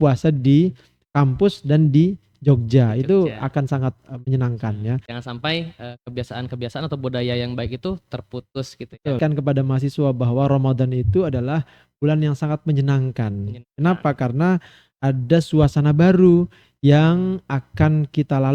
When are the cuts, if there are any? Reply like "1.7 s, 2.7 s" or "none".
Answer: 5.0 s, 9.2 s